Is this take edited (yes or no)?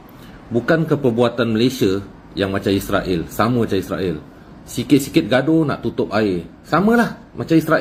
no